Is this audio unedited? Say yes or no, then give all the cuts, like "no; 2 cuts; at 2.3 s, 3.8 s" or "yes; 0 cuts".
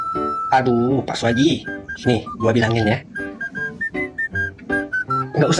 yes; 0 cuts